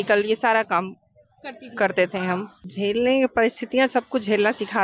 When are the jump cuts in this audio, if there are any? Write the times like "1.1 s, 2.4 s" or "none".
2.6 s